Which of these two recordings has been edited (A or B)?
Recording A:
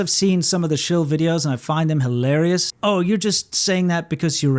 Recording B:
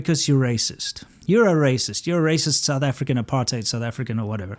A